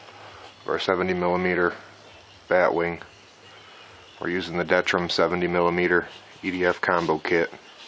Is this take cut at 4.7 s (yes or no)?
no